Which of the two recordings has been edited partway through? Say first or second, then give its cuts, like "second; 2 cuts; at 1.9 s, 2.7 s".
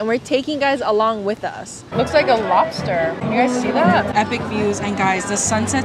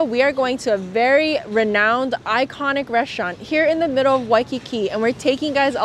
first; 3 cuts; at 1.9 s, 3.2 s, 4.1 s